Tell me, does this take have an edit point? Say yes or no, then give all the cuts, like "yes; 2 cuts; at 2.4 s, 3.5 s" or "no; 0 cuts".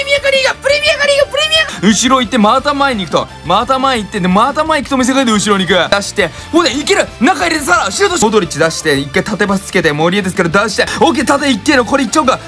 yes; 4 cuts; at 1.7 s, 5.9 s, 8.2 s, 10.9 s